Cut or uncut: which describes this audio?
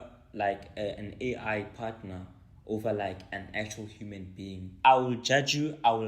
cut